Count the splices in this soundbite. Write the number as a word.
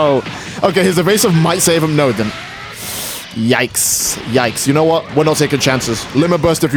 zero